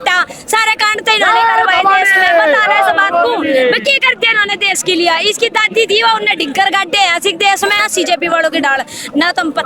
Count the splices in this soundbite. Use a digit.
1